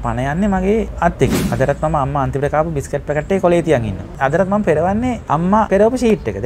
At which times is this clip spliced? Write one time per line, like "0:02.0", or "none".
0:01.3
0:04.2
0:05.6